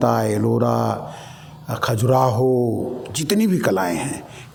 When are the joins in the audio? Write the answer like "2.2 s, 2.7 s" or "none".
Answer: none